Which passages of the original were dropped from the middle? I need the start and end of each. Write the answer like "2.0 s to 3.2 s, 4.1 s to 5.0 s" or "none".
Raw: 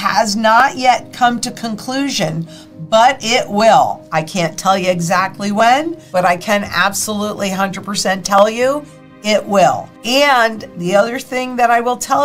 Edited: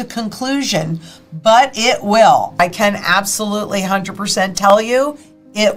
4.1 s to 6.3 s